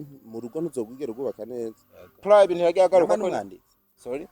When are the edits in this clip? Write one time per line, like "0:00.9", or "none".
0:02.2